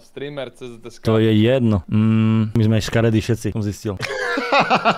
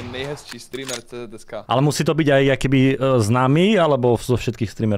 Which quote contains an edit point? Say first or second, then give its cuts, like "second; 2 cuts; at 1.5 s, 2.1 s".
second; 1 cut; at 1.6 s